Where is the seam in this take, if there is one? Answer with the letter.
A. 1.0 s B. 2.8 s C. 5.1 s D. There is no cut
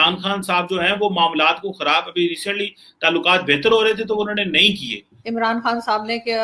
D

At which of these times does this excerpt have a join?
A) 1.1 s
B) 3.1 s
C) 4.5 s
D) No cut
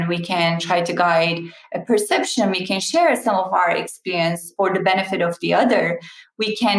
C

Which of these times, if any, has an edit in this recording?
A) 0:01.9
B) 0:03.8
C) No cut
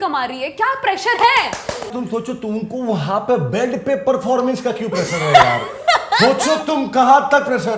A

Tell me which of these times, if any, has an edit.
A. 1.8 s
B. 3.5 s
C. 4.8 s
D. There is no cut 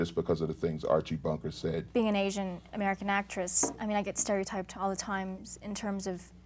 A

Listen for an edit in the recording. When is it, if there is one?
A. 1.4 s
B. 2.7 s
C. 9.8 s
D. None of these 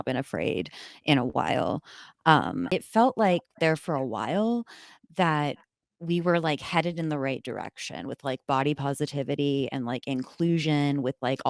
B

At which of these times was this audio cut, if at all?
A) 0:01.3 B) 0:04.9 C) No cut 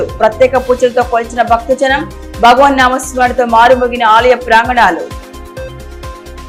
C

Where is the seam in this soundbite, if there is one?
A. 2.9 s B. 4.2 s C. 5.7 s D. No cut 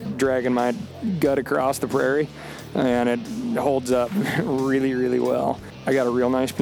C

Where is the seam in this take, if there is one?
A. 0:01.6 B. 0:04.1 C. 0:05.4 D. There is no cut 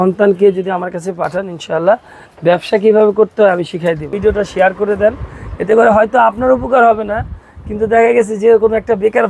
B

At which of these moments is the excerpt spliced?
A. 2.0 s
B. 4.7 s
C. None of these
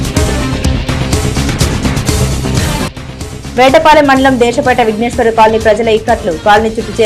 A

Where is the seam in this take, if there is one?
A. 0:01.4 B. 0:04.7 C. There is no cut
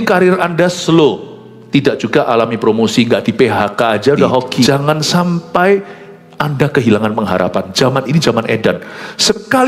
B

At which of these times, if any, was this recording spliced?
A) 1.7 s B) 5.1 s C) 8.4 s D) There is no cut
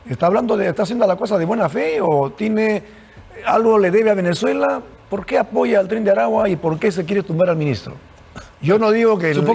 D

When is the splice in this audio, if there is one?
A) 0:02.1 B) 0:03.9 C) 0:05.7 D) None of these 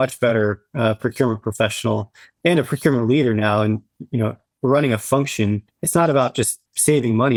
D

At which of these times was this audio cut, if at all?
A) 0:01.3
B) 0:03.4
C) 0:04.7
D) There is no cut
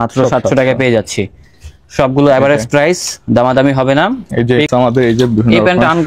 C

